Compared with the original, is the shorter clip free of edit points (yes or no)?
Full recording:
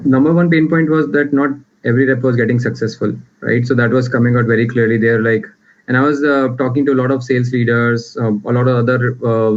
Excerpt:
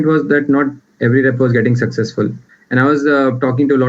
no